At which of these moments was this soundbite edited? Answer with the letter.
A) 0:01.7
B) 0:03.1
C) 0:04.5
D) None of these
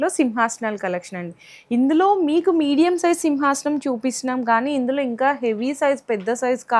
D